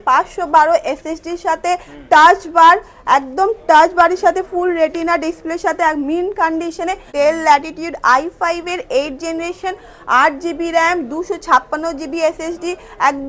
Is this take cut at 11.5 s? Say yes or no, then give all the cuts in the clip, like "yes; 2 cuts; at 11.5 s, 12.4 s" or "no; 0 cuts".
no; 1 cut; at 7.1 s